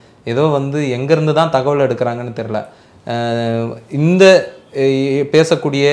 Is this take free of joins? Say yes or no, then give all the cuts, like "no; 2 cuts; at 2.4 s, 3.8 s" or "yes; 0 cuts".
yes; 0 cuts